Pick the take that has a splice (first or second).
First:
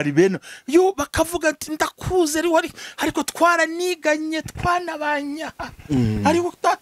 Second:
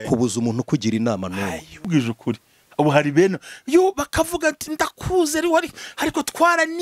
second